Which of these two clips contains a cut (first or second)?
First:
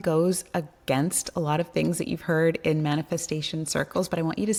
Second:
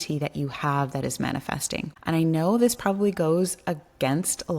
second